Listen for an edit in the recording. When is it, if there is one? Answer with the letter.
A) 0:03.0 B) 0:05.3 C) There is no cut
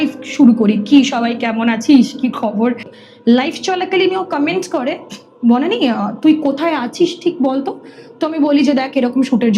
A